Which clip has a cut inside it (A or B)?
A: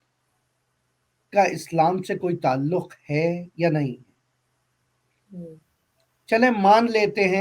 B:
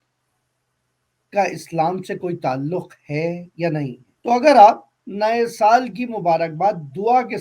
B